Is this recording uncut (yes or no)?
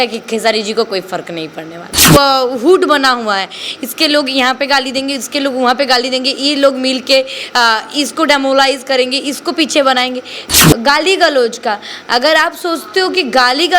no